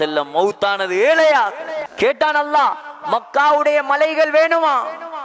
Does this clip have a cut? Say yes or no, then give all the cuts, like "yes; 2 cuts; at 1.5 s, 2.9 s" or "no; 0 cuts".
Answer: yes; 1 cut; at 1.9 s